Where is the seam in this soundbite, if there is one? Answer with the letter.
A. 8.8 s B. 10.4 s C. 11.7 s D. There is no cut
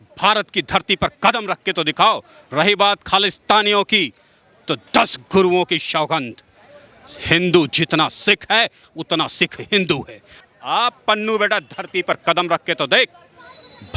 B